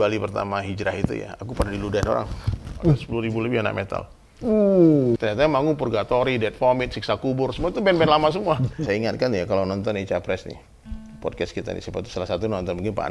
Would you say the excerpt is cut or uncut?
cut